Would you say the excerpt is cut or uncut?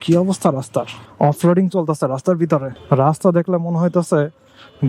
cut